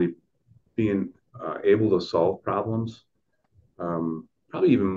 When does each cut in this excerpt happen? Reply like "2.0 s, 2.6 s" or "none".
none

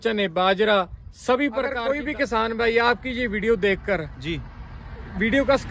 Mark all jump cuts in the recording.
1.8 s

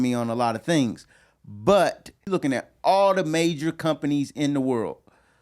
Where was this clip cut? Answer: 2.1 s

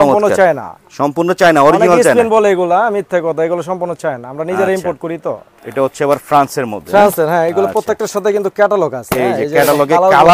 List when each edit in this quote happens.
5.5 s

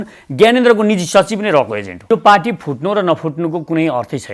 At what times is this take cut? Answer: 2.1 s

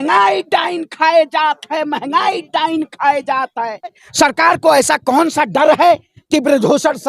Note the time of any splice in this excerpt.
4.0 s

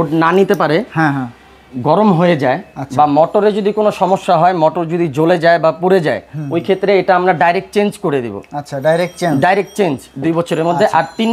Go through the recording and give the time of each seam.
none

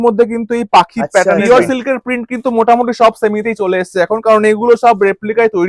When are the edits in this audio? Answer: 1.2 s

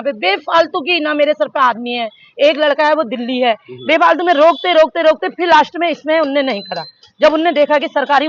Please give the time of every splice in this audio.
none

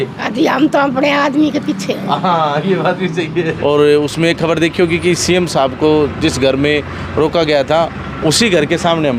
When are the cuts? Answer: 3.6 s

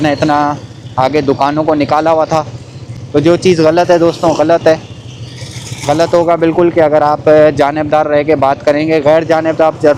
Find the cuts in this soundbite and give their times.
none

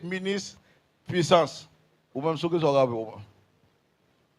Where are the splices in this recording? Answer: 2.2 s

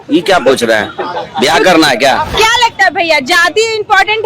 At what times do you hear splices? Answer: 2.3 s

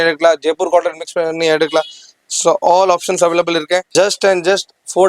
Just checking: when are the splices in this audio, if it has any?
3.9 s

